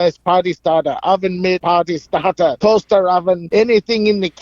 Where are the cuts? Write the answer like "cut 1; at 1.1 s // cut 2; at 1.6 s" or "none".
cut 1; at 1.6 s // cut 2; at 2.6 s // cut 3; at 3.4 s